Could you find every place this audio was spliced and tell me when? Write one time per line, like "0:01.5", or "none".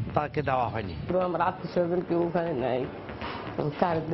0:01.0